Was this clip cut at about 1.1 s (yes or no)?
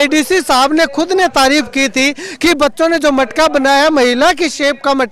no